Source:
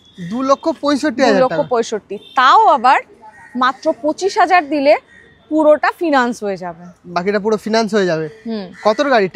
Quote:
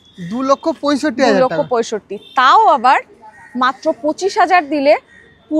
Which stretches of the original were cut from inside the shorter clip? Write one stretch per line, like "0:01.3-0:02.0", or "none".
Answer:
none